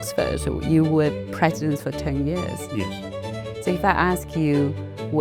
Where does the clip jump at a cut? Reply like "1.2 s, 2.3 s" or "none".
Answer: none